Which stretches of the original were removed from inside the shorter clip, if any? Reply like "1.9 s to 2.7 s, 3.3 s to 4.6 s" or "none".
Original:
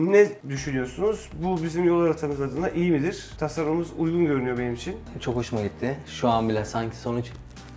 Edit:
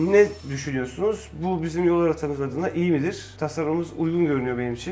none